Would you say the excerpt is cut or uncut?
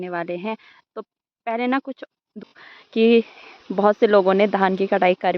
cut